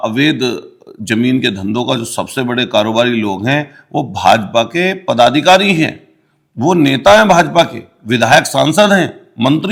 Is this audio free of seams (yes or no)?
yes